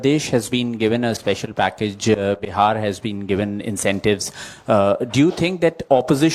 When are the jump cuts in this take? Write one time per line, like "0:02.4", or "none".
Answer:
none